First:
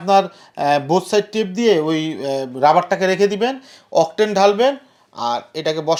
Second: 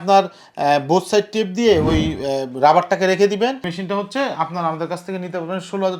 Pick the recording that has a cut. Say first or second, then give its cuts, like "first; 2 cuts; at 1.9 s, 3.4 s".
second; 1 cut; at 3.7 s